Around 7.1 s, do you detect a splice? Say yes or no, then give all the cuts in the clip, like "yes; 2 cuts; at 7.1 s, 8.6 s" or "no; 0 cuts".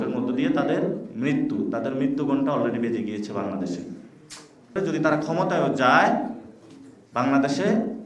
no; 1 cut; at 4.7 s